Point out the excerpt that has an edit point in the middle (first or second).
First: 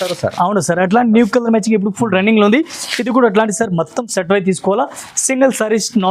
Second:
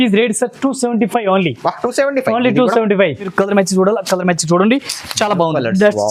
second